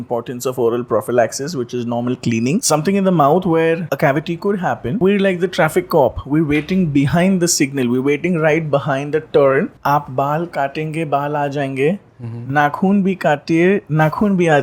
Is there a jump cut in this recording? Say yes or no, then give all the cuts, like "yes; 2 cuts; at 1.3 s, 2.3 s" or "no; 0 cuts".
yes; 4 cuts; at 2.6 s, 3.8 s, 5.0 s, 9.7 s